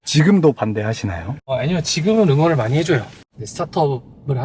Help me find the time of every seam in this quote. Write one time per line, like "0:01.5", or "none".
0:01.5
0:03.2